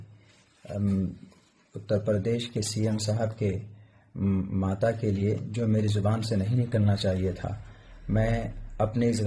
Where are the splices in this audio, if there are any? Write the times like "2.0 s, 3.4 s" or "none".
none